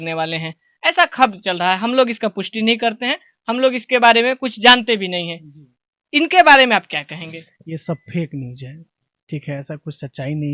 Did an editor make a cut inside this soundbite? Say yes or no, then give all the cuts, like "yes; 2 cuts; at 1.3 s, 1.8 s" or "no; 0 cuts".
no; 0 cuts